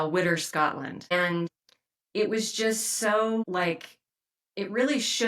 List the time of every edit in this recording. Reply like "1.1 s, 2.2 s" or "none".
1.5 s, 3.4 s